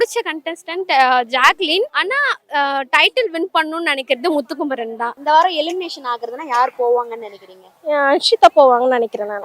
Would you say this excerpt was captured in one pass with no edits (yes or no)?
no